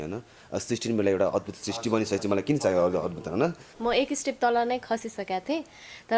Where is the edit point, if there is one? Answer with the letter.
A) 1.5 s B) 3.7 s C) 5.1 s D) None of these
B